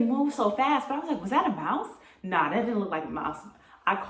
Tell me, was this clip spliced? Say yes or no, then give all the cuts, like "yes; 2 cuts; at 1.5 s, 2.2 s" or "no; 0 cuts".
no; 0 cuts